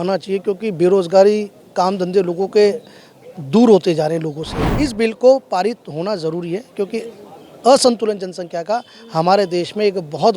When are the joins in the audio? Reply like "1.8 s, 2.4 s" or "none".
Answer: 4.6 s

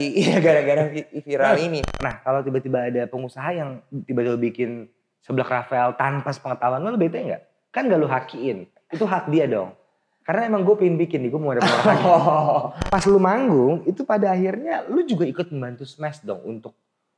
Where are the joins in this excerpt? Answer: 1.9 s, 12.8 s

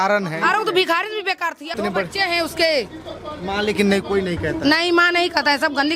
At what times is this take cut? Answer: 1.8 s

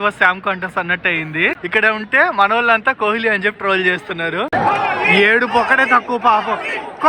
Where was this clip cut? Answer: 1.6 s, 4.5 s

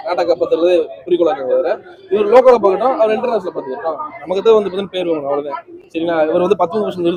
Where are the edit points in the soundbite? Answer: none

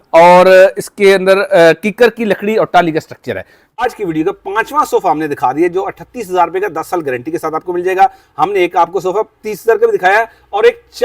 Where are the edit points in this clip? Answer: 3.8 s

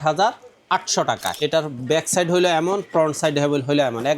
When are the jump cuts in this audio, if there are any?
1.3 s

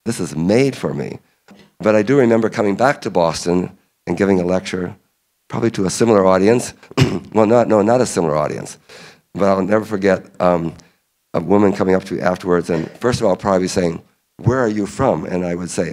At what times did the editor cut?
1.5 s

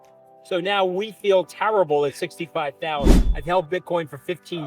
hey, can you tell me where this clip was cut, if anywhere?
3.3 s

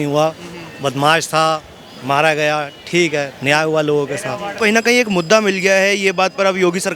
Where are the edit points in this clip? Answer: 4.6 s

